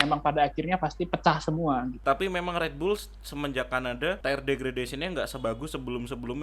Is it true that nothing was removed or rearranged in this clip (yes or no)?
no